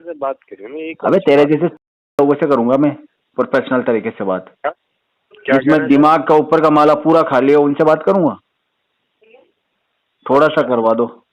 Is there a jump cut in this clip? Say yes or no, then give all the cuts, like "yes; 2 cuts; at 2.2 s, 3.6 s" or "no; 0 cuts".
no; 0 cuts